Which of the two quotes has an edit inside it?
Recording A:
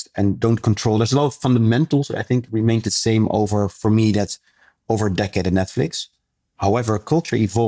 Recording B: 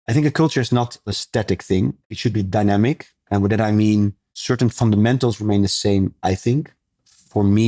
B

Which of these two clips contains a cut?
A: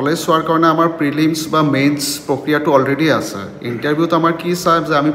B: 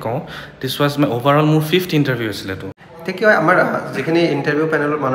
B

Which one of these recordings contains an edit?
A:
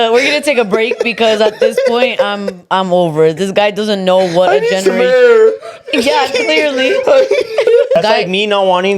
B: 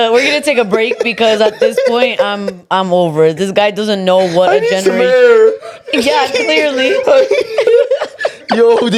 A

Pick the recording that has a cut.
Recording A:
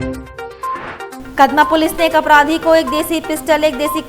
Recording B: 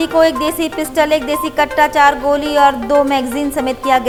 A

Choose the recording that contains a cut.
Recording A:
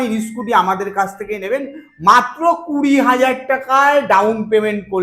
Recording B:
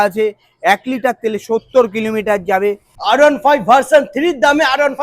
B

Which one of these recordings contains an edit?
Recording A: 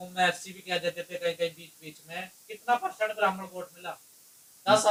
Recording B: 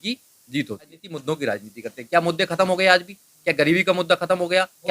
B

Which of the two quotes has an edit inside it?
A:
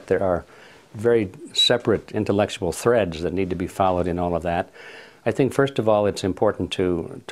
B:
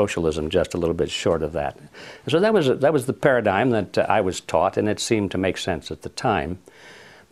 B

